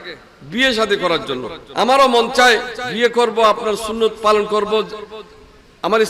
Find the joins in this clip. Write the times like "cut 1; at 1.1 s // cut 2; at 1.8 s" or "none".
cut 1; at 1.6 s // cut 2; at 2.8 s